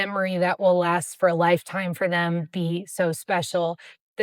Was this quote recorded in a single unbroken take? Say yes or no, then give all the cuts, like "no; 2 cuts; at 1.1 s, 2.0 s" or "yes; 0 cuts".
yes; 0 cuts